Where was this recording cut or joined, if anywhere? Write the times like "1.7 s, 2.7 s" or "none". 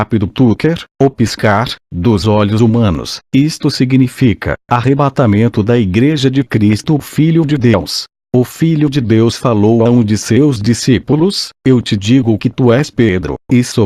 7.8 s